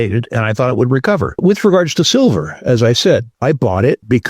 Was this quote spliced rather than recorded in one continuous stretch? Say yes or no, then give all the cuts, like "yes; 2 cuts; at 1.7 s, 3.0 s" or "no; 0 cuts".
yes; 1 cut; at 1.3 s